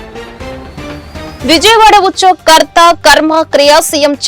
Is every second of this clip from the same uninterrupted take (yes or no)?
no